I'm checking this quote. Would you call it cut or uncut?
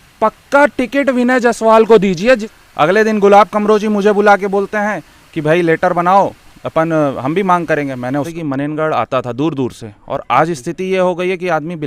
cut